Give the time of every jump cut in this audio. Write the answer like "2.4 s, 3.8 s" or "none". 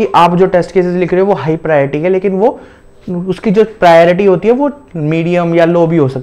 none